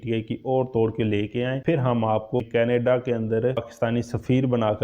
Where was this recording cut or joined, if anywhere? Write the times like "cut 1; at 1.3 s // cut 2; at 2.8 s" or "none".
cut 1; at 2.4 s // cut 2; at 3.6 s